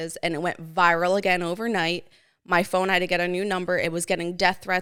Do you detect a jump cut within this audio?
no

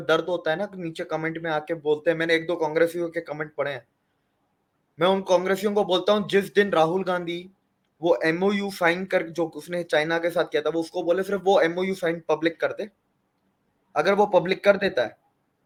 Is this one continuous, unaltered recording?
yes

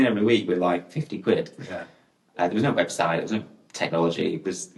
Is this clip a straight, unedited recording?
yes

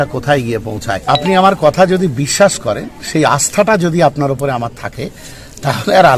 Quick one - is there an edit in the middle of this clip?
yes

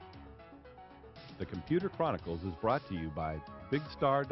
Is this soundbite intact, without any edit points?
no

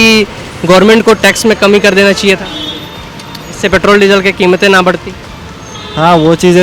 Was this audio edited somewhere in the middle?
no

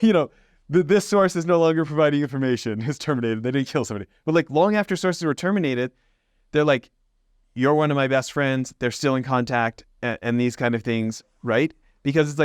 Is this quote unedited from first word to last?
yes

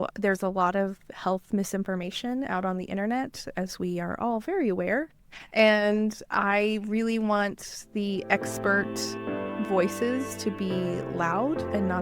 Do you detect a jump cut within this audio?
no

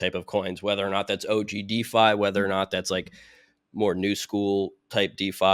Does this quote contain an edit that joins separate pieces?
no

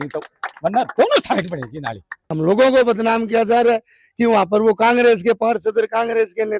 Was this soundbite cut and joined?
yes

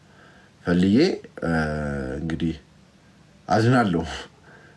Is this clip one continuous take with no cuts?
yes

